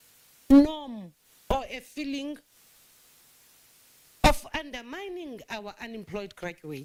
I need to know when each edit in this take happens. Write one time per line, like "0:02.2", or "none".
none